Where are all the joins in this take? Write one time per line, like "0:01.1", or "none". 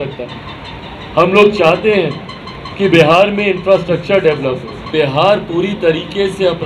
0:04.8

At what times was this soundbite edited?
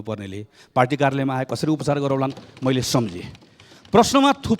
none

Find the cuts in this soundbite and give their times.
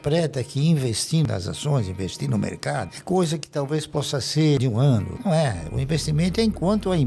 0:01.3
0:04.9

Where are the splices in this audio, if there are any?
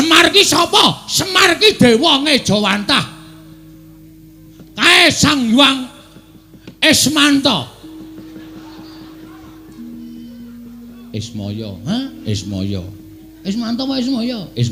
none

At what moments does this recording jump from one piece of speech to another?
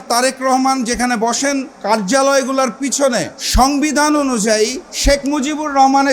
0:01.7
0:03.4
0:04.9

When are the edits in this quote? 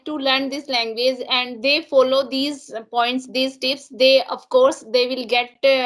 none

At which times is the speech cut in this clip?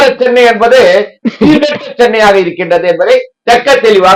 none

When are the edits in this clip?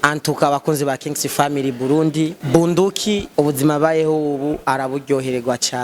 0:02.4
0:03.3

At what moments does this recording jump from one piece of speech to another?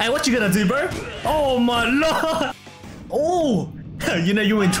0:02.6

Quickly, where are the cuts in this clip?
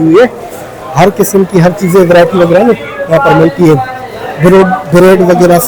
none

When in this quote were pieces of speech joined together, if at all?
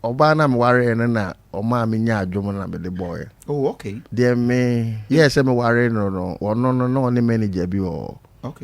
0:03.9
0:04.9
0:06.3

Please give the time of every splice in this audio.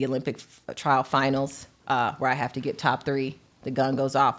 none

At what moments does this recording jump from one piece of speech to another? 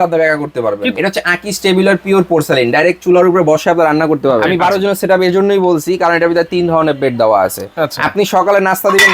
0:01.0
0:04.5

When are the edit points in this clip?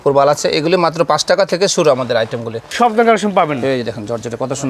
0:02.7

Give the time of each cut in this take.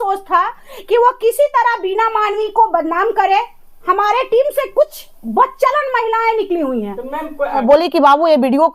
0:07.6

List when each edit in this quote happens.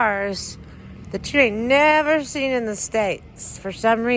none

